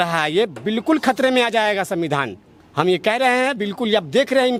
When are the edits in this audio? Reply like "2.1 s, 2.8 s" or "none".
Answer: none